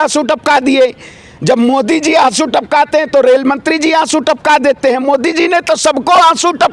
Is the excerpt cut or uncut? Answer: uncut